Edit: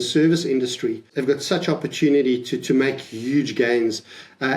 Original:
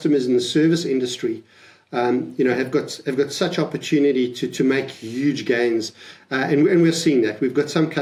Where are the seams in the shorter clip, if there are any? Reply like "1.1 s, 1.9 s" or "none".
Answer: 1.1 s